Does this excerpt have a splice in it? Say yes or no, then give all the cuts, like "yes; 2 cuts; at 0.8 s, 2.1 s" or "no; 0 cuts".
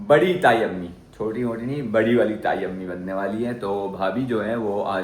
no; 0 cuts